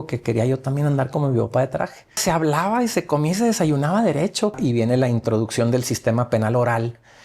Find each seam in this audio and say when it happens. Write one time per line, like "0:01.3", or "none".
0:02.2
0:04.5